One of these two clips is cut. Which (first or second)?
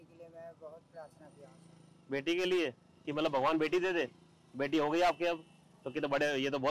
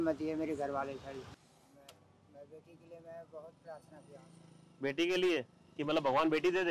second